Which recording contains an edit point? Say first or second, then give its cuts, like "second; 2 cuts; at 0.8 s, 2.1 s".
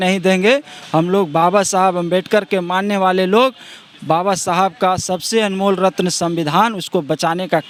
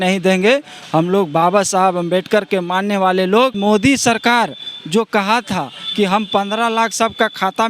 second; 1 cut; at 3.6 s